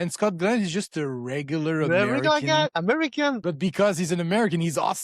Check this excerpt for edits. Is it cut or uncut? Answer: cut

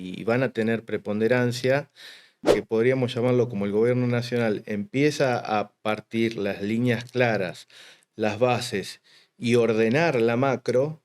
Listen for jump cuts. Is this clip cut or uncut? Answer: cut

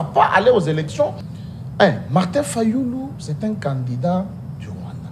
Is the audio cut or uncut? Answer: cut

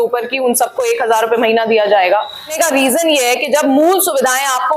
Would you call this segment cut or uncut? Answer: cut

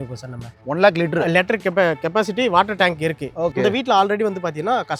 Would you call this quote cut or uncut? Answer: cut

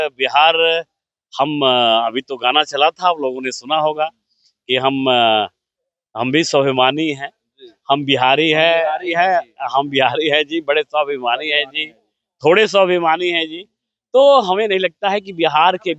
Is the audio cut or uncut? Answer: uncut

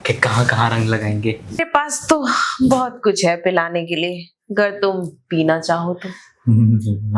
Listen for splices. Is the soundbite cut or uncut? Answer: cut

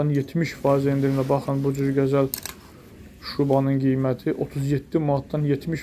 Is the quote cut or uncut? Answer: uncut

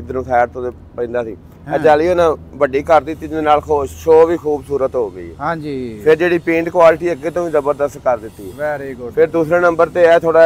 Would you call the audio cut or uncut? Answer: uncut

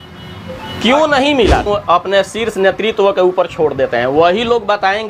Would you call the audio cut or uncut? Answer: cut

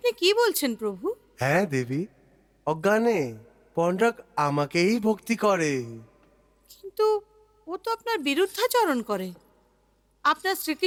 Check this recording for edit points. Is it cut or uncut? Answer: uncut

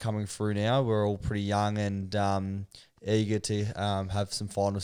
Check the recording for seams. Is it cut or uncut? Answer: uncut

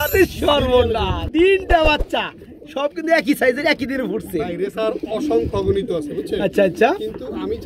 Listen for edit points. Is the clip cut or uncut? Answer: cut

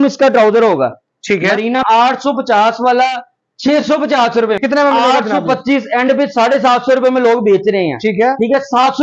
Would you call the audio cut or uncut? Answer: cut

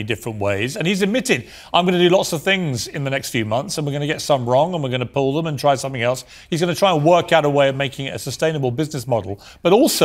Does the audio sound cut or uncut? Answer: uncut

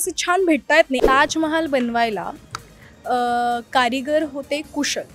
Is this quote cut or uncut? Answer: cut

